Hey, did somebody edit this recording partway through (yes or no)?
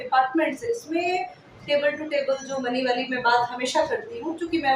no